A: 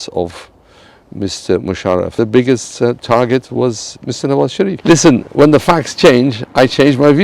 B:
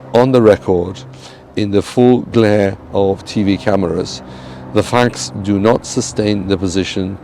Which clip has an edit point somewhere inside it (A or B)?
A